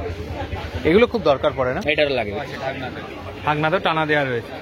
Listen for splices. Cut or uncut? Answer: cut